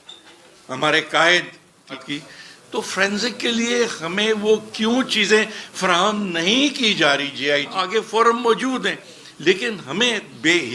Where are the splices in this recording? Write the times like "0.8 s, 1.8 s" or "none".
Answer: 2.0 s, 7.8 s